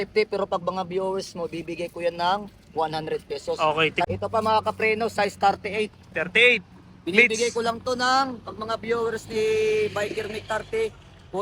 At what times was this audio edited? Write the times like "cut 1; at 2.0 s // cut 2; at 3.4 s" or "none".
cut 1; at 4.0 s

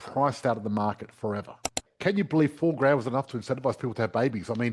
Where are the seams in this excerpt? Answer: cut 1; at 1.8 s

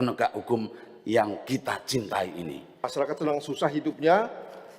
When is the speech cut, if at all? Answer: cut 1; at 2.9 s

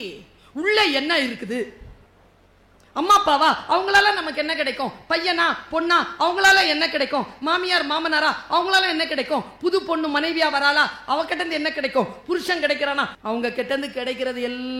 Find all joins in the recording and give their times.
cut 1; at 13.2 s

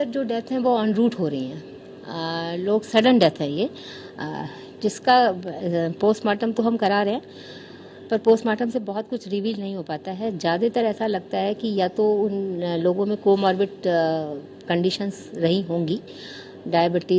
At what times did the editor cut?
none

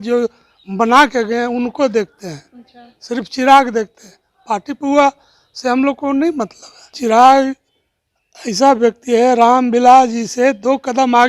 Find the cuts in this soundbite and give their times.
cut 1; at 6.9 s

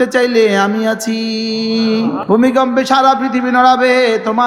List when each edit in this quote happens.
cut 1; at 2.2 s

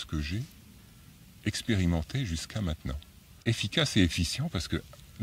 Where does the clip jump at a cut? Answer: cut 1; at 3.4 s

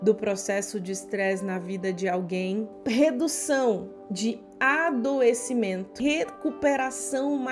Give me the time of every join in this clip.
cut 1; at 2.7 s // cut 2; at 5.9 s

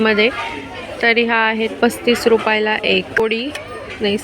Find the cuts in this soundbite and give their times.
cut 1; at 3.2 s

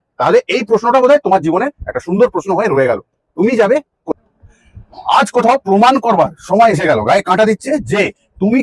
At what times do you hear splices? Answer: cut 1; at 4.0 s

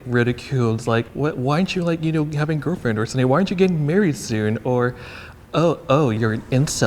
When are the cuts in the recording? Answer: cut 1; at 1.1 s // cut 2; at 6.2 s

